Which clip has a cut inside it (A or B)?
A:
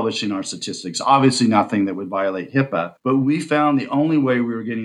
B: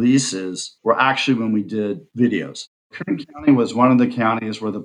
B